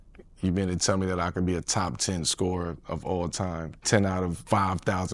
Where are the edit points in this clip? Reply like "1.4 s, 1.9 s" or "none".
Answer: none